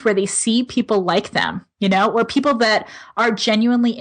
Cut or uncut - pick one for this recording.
uncut